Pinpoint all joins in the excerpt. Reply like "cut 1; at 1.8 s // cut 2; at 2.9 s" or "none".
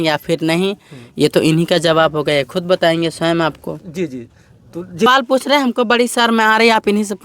cut 1; at 5.1 s